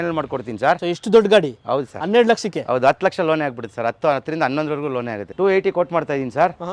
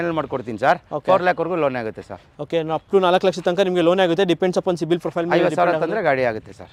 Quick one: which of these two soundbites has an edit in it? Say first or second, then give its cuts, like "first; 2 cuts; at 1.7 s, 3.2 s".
first; 2 cuts; at 0.8 s, 5.2 s